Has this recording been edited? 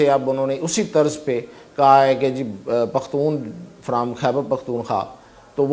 no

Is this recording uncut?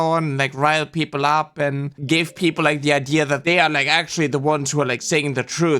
no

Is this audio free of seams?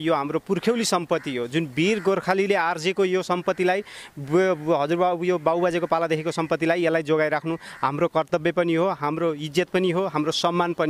yes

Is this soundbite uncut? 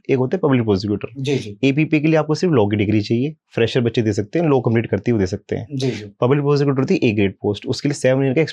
yes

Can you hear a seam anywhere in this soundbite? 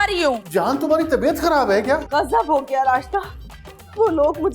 yes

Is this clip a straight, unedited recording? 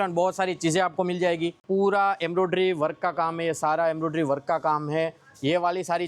no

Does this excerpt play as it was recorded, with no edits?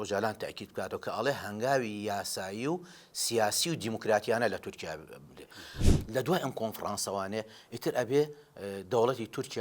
no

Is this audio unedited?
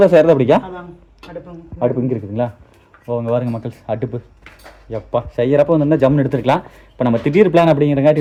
yes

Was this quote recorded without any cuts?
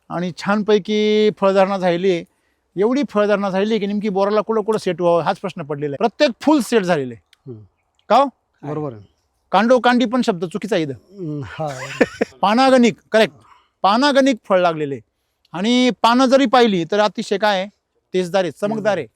no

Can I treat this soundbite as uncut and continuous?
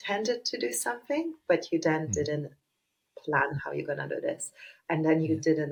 yes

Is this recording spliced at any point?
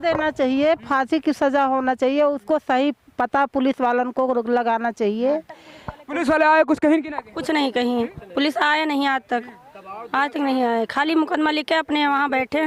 no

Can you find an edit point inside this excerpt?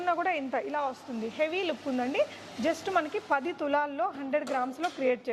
no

